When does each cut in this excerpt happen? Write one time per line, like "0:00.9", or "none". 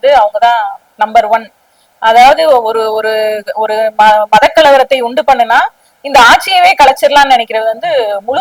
none